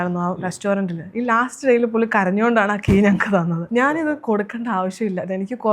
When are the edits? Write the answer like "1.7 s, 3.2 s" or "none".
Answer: 3.7 s